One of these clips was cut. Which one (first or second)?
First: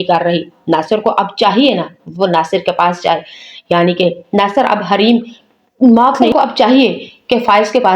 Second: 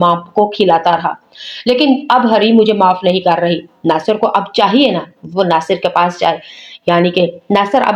first